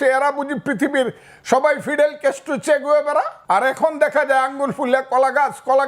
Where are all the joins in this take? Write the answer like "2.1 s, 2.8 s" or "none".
3.4 s

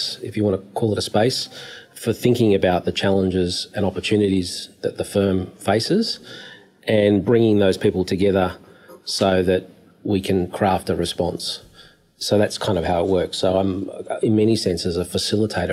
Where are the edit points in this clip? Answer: 1.9 s

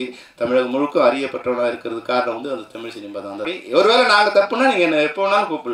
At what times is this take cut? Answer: 3.4 s

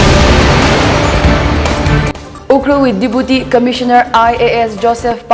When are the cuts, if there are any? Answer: 2.3 s

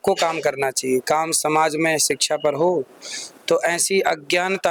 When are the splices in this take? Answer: none

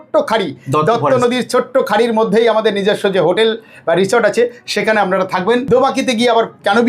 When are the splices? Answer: 5.6 s

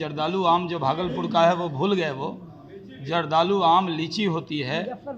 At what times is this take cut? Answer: none

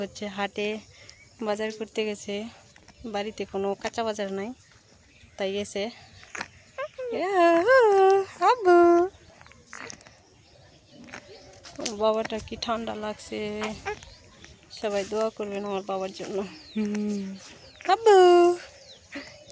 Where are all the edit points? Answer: none

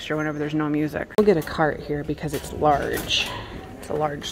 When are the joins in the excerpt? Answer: 1.0 s

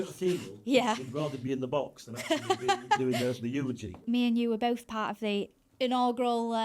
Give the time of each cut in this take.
4.0 s

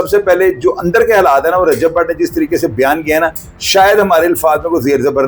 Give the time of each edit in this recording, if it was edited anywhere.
none

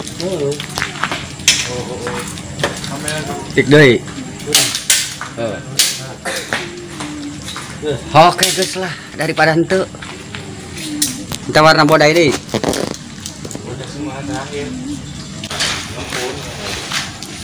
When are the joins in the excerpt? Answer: 15.5 s

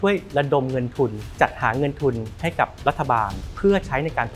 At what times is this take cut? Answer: 1.2 s, 3.4 s

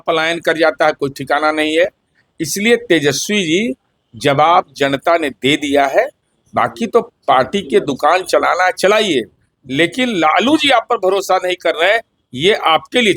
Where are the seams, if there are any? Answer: none

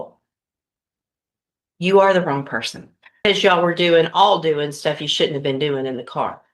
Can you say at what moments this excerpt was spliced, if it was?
3.3 s

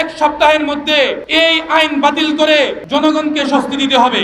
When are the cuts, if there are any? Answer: 1.2 s, 2.8 s

